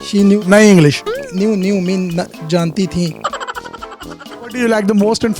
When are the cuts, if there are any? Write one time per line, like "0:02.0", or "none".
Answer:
0:04.2